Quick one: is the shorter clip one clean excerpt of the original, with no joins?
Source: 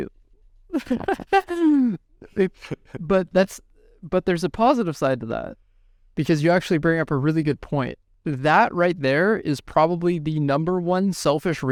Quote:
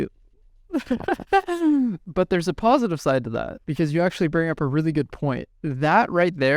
no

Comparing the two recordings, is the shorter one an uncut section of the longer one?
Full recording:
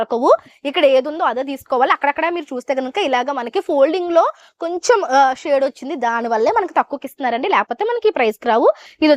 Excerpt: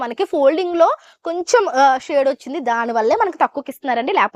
yes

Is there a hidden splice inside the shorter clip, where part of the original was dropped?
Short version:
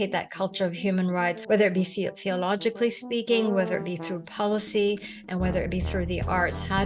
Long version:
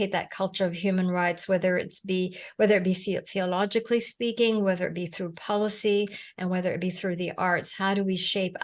yes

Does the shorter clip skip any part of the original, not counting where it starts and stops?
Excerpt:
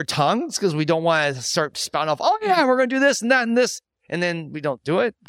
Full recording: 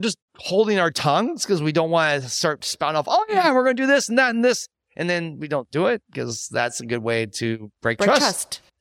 no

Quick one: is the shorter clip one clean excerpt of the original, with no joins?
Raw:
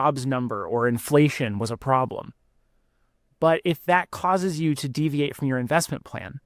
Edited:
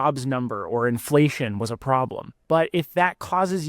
no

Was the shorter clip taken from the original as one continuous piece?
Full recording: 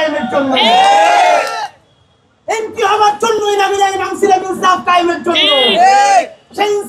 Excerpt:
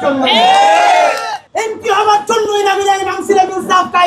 no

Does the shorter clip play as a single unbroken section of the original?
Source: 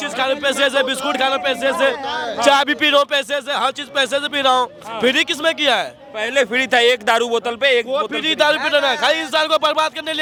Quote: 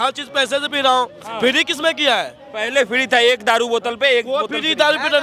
yes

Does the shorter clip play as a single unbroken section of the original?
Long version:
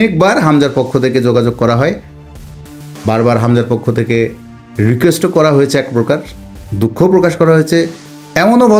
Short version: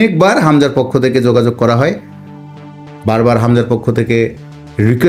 yes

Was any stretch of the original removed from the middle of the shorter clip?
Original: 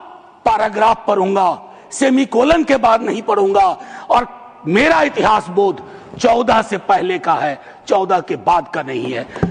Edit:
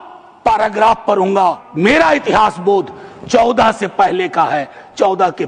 yes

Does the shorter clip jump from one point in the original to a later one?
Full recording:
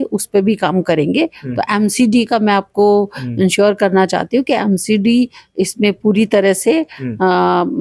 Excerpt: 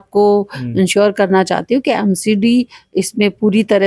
no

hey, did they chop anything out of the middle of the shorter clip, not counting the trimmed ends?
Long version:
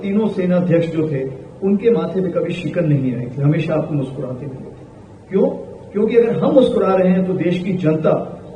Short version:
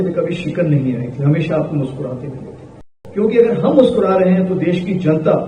yes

